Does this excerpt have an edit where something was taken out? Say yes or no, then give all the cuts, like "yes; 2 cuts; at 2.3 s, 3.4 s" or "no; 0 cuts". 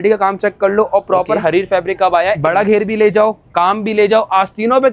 yes; 1 cut; at 2.4 s